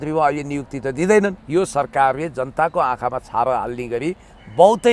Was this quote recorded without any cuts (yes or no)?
no